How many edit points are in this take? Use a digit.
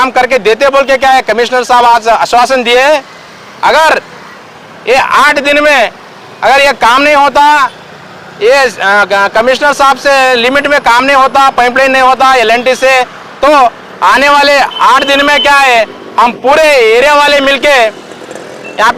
0